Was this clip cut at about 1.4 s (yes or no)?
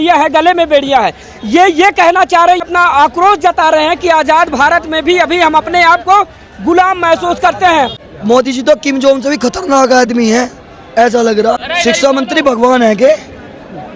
no